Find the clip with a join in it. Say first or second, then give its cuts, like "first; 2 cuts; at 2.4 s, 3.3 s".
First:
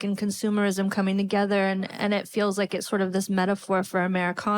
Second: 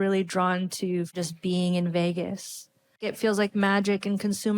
second; 2 cuts; at 1.2 s, 3.0 s